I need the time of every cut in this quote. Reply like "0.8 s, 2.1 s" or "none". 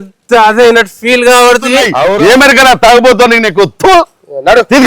2.1 s